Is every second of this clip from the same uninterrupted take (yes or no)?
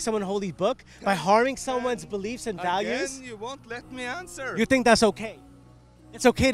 yes